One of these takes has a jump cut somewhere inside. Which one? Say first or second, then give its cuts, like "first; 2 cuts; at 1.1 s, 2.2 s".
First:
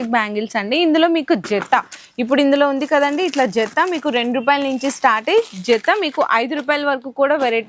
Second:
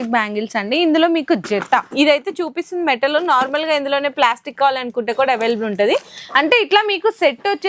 second; 1 cut; at 1.9 s